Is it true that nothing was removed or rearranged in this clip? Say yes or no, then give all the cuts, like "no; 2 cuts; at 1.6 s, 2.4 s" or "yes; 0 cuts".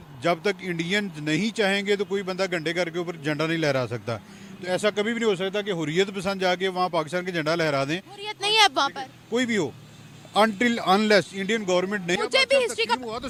yes; 0 cuts